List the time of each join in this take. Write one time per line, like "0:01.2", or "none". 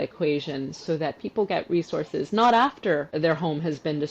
0:03.1